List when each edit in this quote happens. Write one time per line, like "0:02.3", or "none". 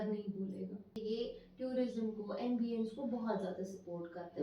0:01.0